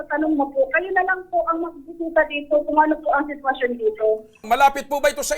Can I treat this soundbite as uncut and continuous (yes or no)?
no